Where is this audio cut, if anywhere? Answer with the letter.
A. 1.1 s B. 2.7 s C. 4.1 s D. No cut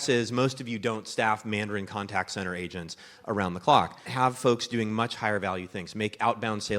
C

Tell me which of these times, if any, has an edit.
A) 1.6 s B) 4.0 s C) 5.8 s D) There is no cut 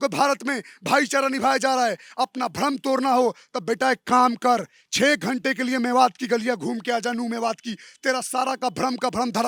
D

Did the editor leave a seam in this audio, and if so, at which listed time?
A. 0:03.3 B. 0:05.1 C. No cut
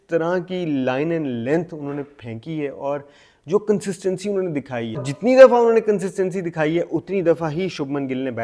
B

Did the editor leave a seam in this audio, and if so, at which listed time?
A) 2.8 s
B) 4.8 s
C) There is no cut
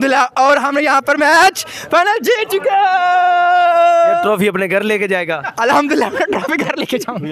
C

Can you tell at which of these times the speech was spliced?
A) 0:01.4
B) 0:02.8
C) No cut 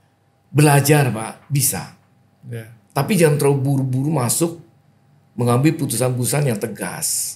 C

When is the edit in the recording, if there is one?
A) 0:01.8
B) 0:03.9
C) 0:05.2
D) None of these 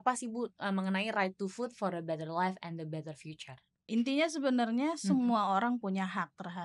B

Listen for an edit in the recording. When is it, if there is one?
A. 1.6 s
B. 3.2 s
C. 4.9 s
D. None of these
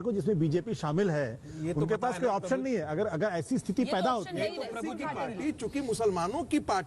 C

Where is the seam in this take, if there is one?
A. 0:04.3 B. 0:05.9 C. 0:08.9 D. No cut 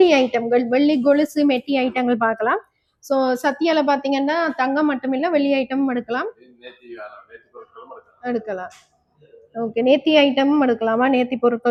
D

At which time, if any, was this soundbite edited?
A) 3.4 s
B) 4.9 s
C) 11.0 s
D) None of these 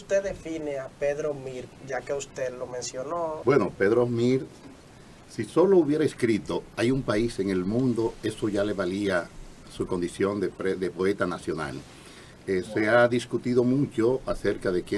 A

